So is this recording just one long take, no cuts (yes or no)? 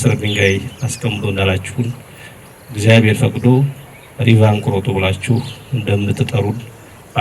yes